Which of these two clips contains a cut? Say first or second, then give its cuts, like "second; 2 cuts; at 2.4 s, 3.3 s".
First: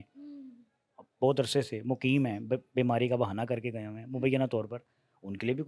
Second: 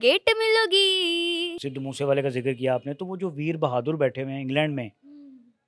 second; 1 cut; at 1.6 s